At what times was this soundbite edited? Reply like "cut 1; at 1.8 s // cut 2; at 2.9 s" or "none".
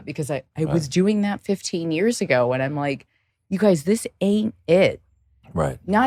none